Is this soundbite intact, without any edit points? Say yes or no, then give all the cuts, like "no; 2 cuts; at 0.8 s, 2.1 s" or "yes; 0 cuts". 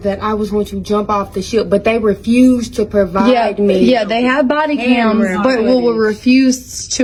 yes; 0 cuts